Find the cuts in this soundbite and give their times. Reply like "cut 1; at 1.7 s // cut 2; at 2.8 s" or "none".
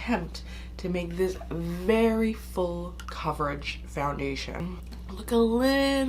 cut 1; at 3.0 s // cut 2; at 4.7 s